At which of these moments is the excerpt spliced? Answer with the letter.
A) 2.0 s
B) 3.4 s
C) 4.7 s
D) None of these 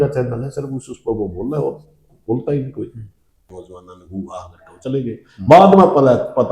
B